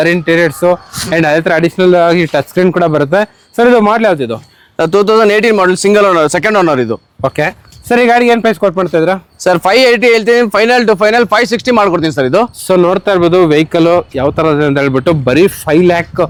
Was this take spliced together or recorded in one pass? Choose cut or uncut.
uncut